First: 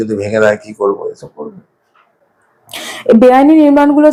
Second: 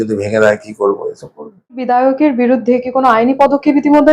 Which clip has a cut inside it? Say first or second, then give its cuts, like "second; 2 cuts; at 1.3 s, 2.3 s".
second; 1 cut; at 1.9 s